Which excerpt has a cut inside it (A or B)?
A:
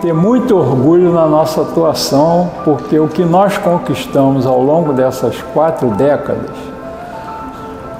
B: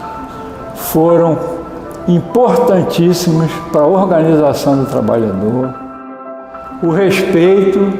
B